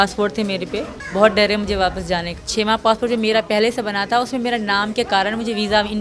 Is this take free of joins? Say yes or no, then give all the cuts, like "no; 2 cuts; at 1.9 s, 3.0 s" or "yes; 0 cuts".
no; 2 cuts; at 1.0 s, 2.4 s